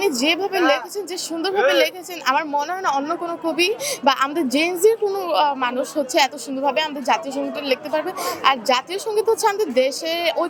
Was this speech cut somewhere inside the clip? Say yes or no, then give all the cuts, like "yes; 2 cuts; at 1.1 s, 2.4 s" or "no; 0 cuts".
no; 0 cuts